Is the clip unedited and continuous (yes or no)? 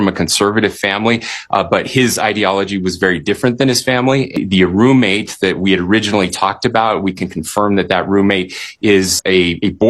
no